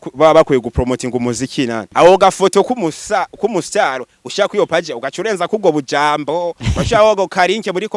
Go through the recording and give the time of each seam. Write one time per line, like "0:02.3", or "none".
0:01.9